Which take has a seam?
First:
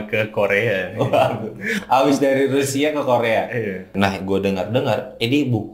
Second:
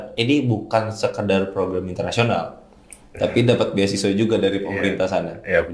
first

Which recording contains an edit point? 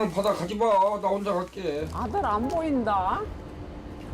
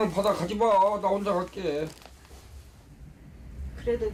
first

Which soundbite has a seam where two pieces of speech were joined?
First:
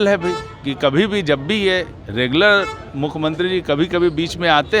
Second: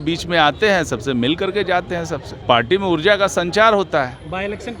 second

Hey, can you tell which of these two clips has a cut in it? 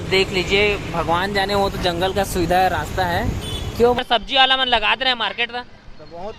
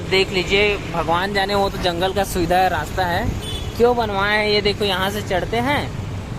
first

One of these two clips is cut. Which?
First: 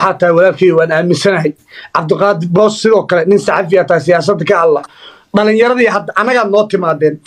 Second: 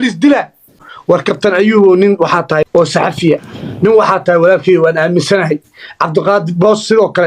second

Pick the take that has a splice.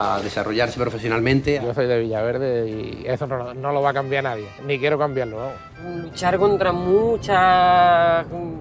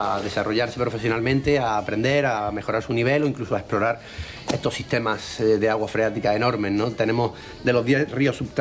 first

